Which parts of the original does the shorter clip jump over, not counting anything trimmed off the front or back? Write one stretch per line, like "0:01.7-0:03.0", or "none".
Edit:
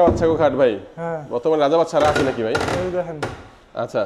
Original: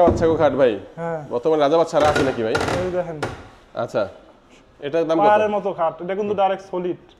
none